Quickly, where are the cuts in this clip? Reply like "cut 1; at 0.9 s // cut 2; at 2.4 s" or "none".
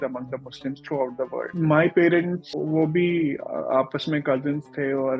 cut 1; at 1.5 s // cut 2; at 2.5 s